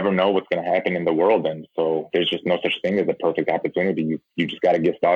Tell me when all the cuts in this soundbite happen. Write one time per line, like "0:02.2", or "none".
0:02.1